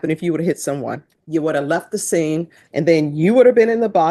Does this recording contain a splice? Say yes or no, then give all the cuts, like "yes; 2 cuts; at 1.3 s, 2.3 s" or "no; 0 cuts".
yes; 2 cuts; at 1.1 s, 2.6 s